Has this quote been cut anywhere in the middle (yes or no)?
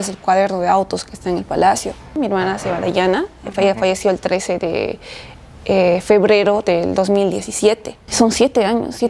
yes